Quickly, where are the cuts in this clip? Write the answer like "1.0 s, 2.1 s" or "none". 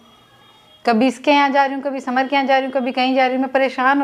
none